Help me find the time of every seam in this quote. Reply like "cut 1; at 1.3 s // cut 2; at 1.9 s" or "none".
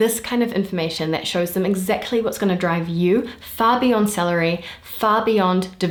none